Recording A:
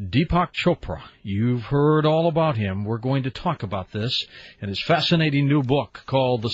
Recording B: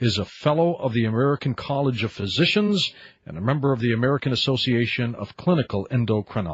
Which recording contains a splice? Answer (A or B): A